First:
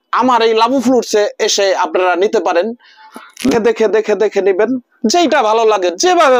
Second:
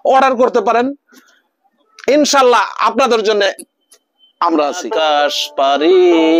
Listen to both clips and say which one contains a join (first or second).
second